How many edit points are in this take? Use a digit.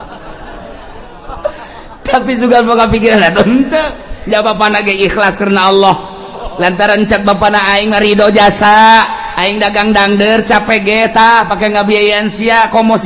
0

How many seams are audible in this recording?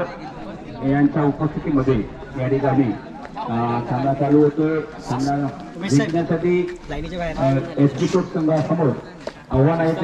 0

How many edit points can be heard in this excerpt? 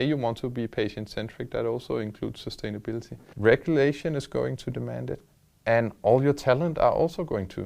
1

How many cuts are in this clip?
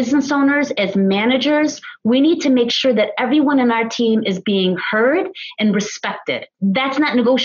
1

